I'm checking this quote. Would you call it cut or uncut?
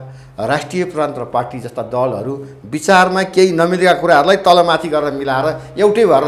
uncut